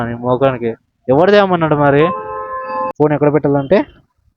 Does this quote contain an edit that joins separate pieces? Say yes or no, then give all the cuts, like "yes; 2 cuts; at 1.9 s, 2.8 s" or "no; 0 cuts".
yes; 1 cut; at 2.9 s